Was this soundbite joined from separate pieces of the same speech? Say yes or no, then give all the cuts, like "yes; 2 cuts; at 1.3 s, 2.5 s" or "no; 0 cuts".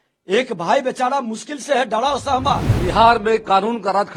yes; 1 cut; at 2.7 s